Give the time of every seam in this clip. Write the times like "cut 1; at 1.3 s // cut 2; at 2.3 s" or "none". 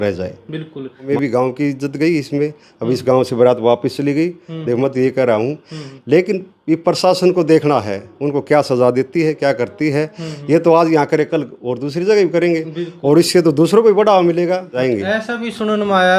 cut 1; at 1.1 s // cut 2; at 14.8 s